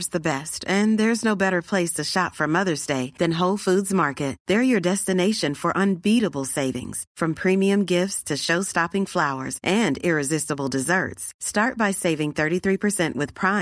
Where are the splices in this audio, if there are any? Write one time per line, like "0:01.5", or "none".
none

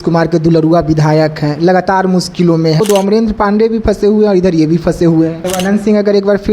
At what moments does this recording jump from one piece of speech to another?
0:02.8
0:05.4

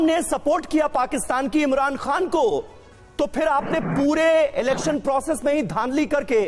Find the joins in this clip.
none

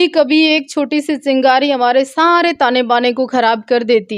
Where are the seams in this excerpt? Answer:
none

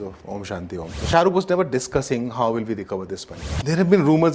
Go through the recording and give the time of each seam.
0:01.0
0:03.5

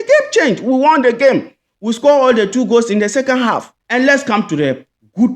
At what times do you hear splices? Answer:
0:03.7

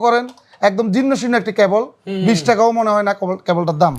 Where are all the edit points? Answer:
none

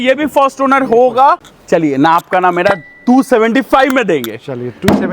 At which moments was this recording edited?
0:01.4

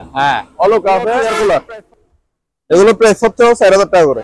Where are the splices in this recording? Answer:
0:01.2

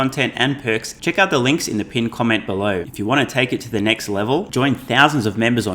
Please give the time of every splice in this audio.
0:00.9
0:02.9

